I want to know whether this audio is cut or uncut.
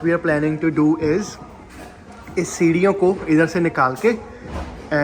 uncut